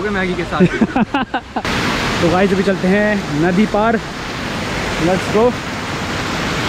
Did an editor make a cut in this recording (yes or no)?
yes